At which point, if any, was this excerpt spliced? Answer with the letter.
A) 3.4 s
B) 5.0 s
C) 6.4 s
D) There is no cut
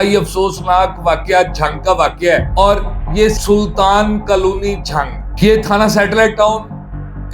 A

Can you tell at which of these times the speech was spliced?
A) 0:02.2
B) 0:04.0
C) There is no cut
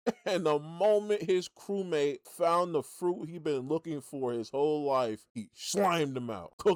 C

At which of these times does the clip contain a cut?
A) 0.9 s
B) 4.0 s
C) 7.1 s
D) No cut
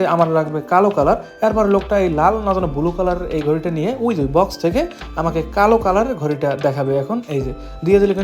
D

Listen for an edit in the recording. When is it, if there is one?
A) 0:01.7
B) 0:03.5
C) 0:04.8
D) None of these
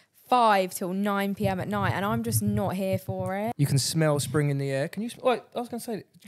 B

